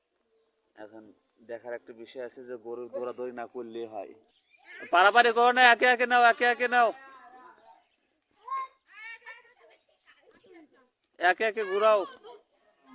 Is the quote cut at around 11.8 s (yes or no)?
no